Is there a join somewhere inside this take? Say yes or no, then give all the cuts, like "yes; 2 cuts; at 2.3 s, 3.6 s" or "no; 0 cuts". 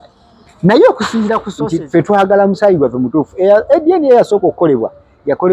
yes; 1 cut; at 1.5 s